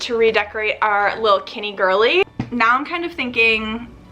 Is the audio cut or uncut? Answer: cut